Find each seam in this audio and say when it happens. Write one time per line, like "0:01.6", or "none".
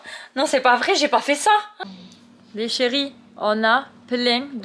0:01.7